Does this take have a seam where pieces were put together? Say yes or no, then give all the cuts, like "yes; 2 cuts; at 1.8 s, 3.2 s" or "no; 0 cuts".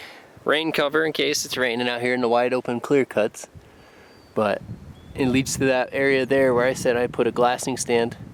no; 0 cuts